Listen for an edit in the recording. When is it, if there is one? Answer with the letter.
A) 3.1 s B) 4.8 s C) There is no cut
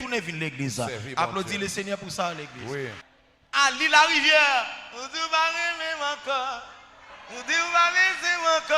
A